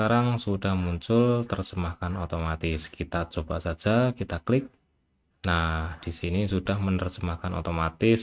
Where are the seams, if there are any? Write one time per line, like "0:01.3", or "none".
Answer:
none